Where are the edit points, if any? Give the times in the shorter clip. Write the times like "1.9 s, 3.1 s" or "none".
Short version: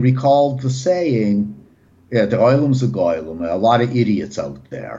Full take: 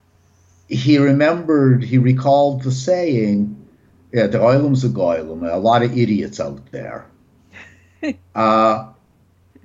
none